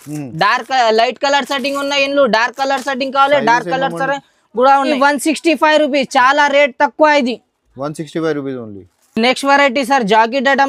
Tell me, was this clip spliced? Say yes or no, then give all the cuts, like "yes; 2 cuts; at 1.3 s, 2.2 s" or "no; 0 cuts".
no; 0 cuts